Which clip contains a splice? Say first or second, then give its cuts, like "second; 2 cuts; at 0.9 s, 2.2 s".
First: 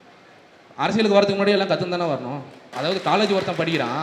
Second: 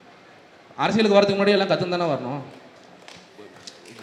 first; 1 cut; at 2.7 s